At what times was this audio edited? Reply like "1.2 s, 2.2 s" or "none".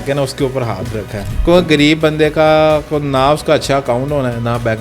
1.2 s